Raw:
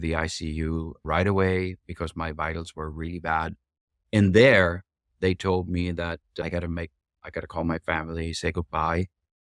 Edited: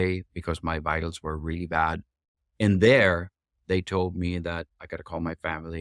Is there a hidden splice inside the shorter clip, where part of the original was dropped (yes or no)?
yes